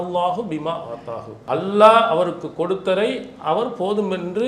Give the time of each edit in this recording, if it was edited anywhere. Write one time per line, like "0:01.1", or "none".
0:01.3